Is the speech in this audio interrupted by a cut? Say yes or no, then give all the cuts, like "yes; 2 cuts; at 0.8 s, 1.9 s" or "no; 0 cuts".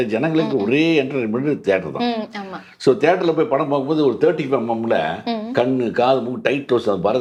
no; 0 cuts